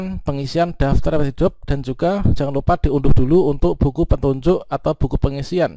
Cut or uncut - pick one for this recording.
uncut